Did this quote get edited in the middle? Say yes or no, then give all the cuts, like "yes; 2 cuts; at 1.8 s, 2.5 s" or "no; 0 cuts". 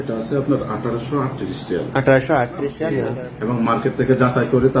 yes; 1 cut; at 2.7 s